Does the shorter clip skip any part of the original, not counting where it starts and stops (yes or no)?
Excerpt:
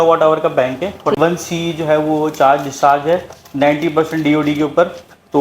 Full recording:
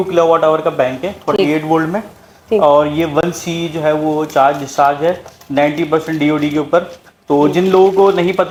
yes